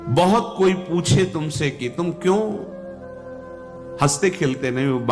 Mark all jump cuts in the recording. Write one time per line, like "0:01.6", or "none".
none